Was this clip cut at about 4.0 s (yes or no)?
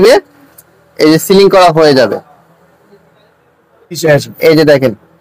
yes